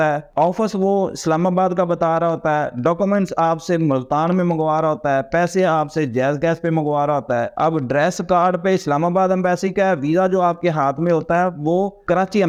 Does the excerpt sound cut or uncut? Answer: uncut